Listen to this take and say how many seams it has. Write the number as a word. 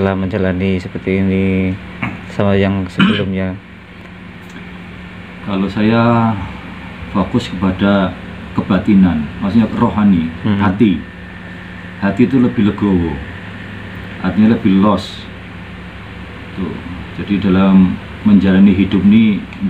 zero